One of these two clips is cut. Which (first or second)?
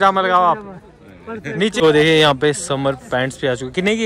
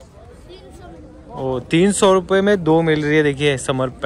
first